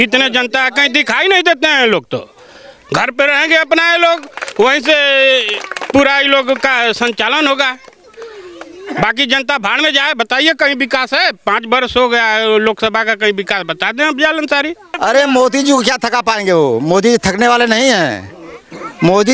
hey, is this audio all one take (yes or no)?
no